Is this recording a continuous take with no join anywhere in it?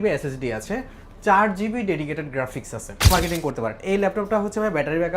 no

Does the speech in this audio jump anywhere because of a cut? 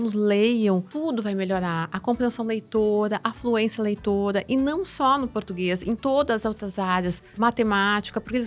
yes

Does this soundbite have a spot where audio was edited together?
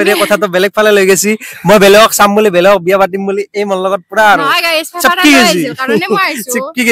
no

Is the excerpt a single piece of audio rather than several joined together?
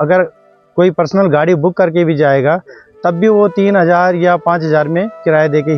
yes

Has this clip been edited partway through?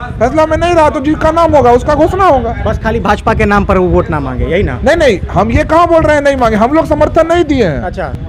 no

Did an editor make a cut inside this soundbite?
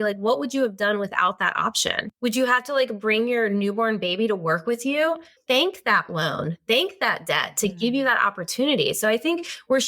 yes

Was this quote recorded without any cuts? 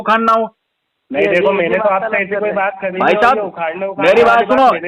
yes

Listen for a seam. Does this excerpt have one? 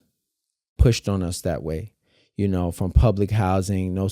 no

